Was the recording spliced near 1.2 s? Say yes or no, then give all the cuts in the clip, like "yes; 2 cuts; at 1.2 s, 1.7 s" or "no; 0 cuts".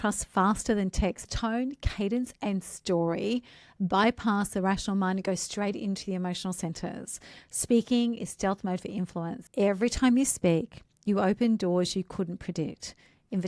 yes; 2 cuts; at 1.2 s, 9.4 s